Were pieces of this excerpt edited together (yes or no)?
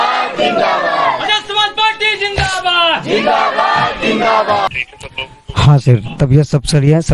yes